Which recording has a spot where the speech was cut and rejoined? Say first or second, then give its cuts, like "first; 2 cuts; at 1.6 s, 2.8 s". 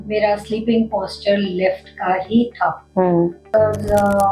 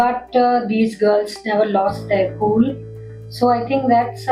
first; 1 cut; at 3.4 s